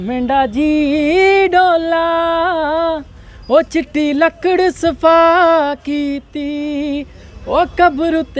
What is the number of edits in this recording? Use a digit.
0